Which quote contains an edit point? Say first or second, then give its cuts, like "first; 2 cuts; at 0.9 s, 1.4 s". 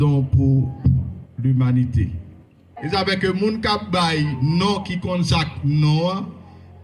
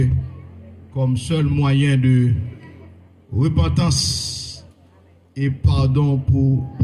first; 1 cut; at 2.7 s